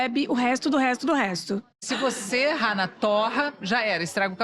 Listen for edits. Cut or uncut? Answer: cut